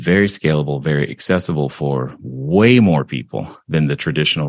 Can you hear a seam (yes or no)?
no